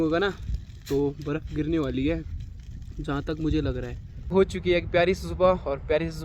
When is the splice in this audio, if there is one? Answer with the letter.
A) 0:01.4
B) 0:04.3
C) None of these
B